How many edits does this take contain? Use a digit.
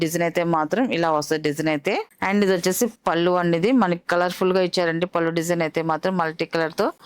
0